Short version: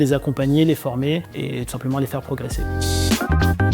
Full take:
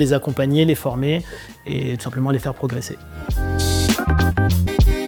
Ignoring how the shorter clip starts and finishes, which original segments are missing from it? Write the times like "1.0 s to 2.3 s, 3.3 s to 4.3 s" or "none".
1.3 s to 1.6 s, 2.9 s to 3.4 s